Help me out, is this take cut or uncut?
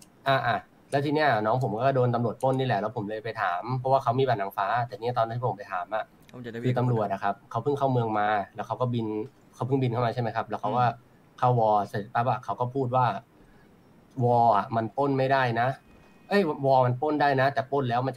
uncut